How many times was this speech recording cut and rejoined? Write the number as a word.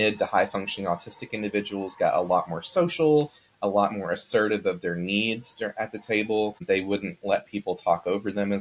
one